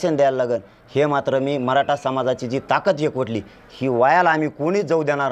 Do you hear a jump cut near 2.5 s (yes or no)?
no